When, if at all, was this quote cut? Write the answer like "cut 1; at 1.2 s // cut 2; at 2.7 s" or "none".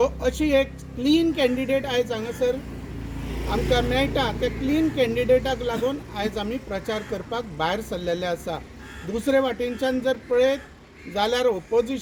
none